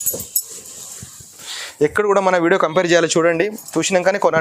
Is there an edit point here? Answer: yes; 1 cut; at 1.3 s

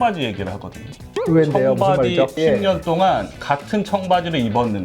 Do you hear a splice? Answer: yes; 1 cut; at 2.4 s

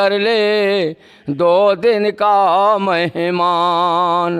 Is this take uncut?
yes; 0 cuts

